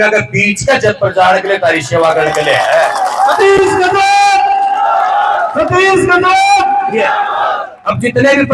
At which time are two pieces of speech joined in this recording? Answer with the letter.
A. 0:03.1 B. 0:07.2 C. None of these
C